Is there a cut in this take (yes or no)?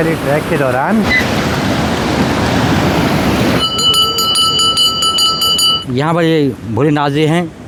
no